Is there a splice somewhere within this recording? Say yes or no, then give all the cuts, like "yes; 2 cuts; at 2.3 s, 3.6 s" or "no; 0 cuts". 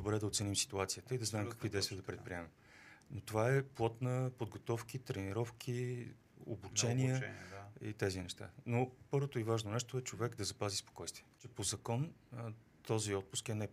yes; 1 cut; at 11.5 s